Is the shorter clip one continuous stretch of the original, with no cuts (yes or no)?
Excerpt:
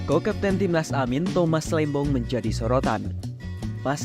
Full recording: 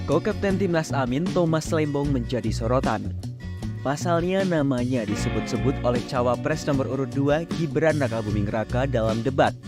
yes